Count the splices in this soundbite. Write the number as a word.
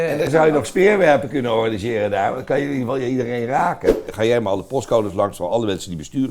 one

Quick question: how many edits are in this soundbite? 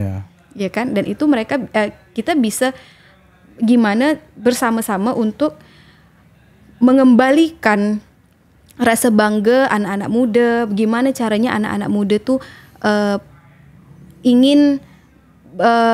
zero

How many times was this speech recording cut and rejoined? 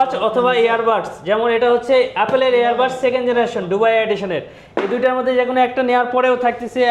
zero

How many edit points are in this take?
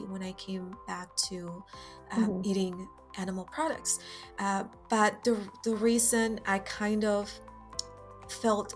zero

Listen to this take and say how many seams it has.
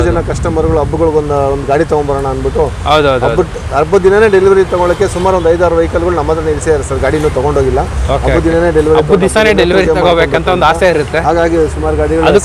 zero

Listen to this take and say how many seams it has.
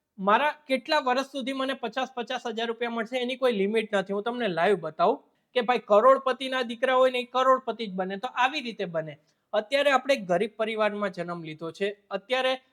one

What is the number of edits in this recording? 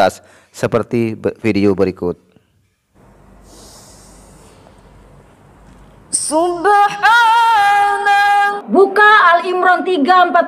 one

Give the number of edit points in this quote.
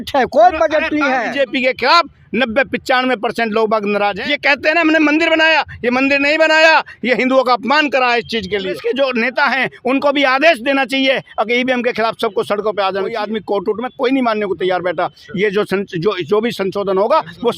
four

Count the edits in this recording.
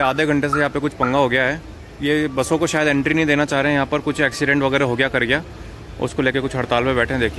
zero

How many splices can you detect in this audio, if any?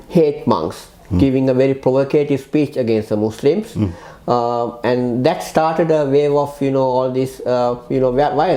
zero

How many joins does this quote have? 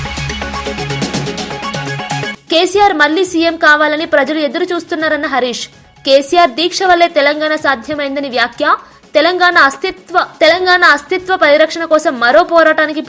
one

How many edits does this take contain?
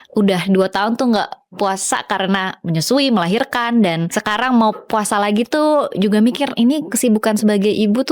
one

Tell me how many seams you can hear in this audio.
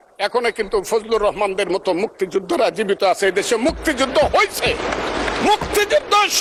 zero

